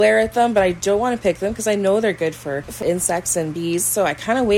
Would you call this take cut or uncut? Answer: cut